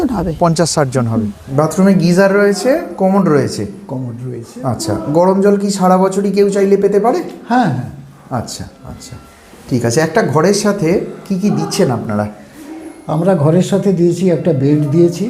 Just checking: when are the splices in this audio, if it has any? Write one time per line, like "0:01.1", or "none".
0:01.4